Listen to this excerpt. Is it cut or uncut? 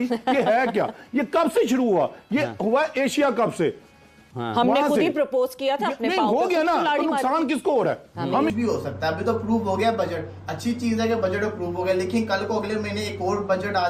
cut